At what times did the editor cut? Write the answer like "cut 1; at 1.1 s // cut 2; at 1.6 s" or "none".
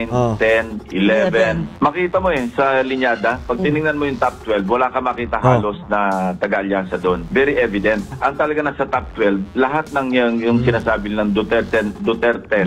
cut 1; at 1.7 s // cut 2; at 7.2 s